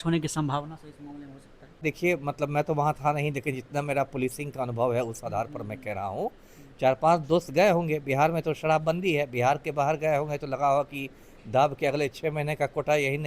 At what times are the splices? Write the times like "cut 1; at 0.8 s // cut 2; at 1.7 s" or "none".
cut 1; at 1.8 s